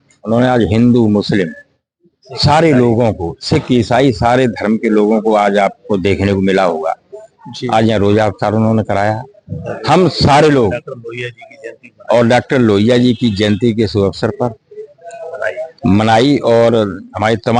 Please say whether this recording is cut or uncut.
uncut